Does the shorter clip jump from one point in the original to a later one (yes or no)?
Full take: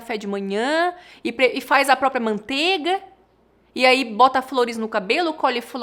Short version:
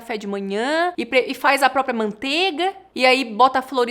yes